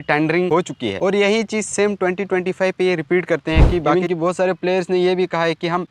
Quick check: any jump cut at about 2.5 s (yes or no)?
no